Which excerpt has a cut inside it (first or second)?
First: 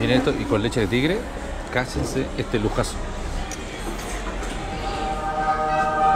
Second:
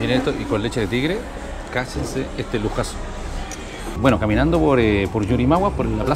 second